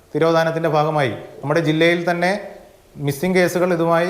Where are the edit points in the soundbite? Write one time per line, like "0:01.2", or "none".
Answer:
0:01.3